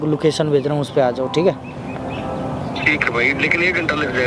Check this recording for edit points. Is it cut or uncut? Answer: uncut